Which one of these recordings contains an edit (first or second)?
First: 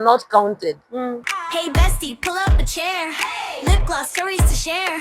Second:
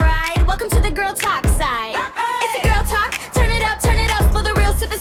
first